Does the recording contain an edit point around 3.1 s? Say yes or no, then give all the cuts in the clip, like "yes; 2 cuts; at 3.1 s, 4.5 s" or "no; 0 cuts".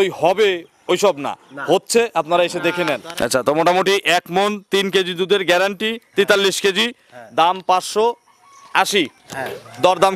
yes; 1 cut; at 3.1 s